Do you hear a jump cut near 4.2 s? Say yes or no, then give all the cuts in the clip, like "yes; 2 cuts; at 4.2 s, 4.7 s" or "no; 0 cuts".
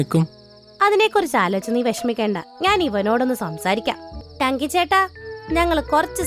yes; 1 cut; at 4.2 s